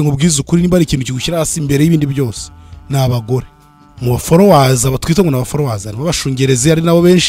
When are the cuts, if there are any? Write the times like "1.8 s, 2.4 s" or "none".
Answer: 3.6 s